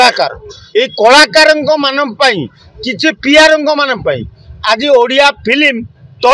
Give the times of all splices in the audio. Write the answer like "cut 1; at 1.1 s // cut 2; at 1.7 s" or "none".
none

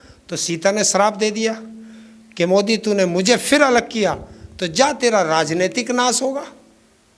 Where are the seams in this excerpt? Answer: none

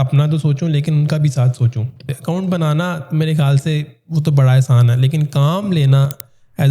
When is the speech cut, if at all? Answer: cut 1; at 2.1 s

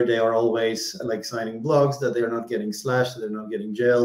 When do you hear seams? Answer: cut 1; at 1.0 s

